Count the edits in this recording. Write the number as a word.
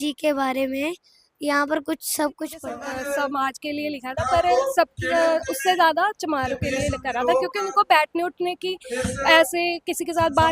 one